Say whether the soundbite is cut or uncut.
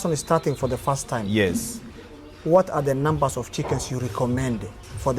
uncut